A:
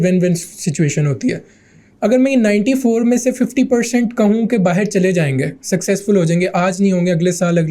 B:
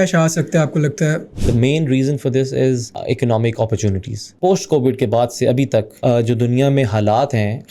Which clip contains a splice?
B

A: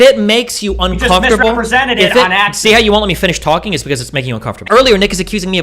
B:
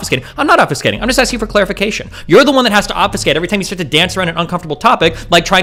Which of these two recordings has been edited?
A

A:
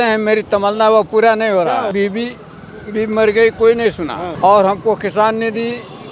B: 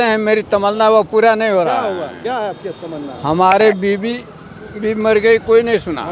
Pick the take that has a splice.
A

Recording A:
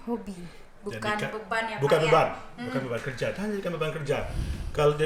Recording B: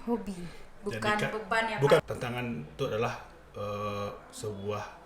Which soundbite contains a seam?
B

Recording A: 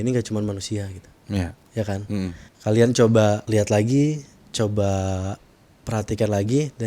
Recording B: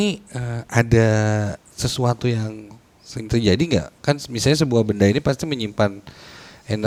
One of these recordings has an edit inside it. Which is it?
A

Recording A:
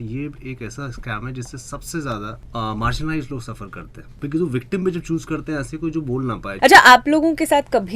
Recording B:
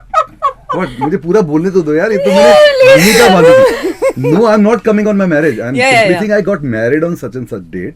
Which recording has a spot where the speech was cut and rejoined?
A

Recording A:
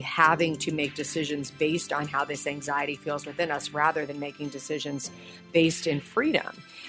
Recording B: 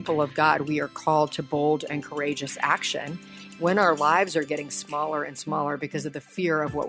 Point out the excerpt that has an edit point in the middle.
B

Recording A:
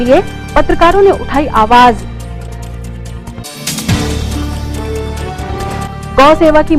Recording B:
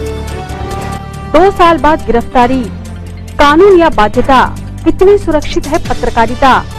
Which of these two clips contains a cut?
B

